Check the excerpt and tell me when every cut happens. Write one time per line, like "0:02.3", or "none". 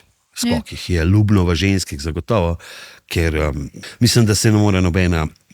0:03.8